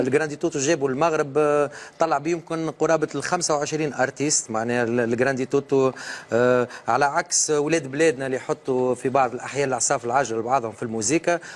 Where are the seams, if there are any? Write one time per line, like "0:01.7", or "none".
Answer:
none